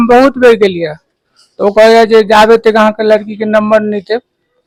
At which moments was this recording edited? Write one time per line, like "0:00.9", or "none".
none